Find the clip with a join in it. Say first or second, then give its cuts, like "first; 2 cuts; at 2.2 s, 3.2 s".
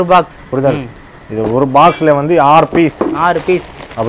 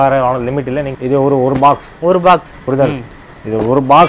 second; 1 cut; at 1.0 s